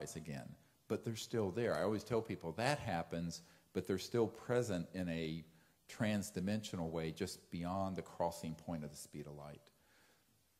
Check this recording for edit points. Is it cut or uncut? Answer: uncut